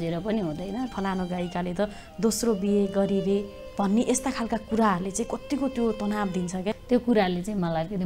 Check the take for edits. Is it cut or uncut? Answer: cut